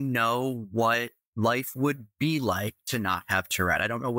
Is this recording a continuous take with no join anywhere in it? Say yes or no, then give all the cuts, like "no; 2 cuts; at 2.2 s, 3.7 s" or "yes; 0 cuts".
yes; 0 cuts